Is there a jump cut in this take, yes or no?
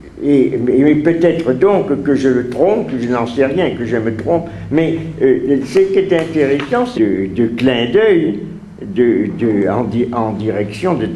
no